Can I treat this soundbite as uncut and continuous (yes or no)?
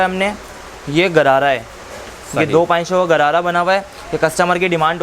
yes